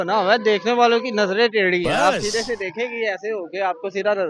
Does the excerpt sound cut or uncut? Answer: uncut